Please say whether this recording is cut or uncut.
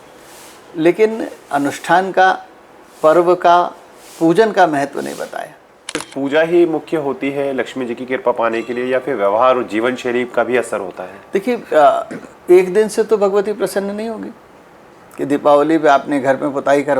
cut